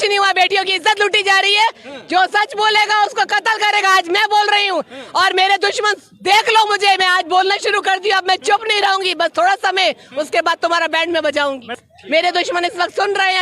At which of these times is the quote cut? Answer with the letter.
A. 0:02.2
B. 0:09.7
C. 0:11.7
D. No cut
C